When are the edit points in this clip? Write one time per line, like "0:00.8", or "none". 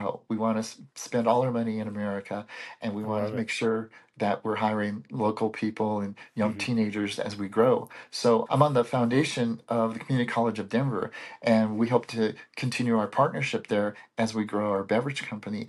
none